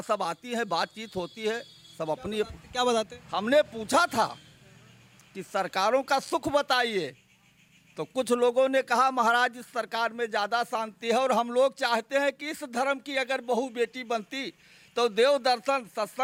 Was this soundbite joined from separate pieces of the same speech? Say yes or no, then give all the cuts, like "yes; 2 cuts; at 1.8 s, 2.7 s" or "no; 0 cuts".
no; 0 cuts